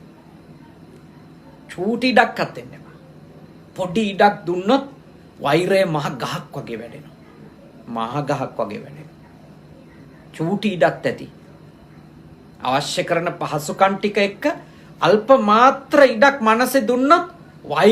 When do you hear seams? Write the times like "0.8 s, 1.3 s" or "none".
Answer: none

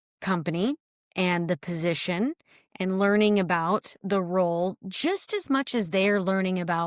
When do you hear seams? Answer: none

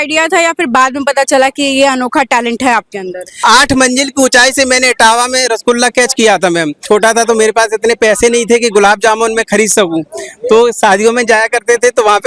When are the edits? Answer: 3.2 s, 6.8 s

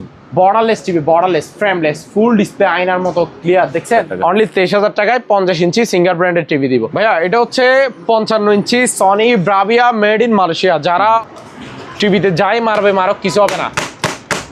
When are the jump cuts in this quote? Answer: 4.1 s, 6.9 s, 11.2 s

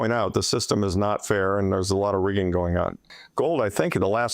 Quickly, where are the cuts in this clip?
3.0 s

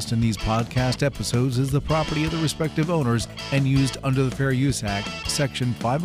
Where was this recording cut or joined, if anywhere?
none

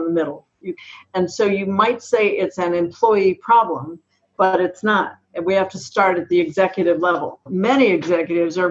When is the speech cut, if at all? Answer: 0.9 s, 7.5 s

